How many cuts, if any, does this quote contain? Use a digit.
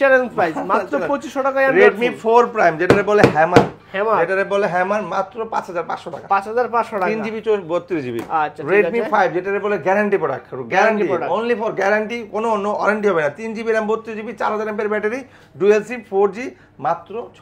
0